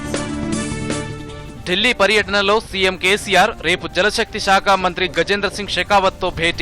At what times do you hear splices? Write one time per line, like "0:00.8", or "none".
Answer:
0:01.3

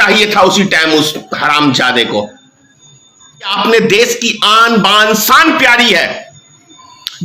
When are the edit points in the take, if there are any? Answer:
0:03.5

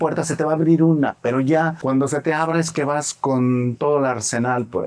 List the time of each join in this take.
0:01.8

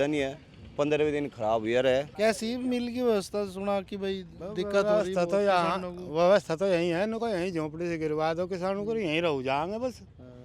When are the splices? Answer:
0:02.1

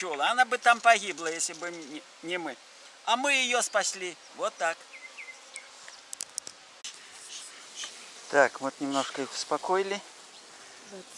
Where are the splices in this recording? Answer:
none

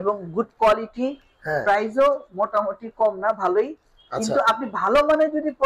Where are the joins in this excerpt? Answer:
none

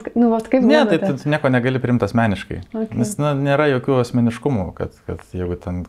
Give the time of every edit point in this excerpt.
none

